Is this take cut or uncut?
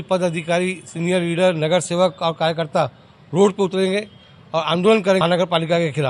cut